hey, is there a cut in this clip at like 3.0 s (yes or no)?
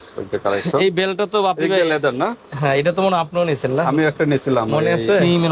no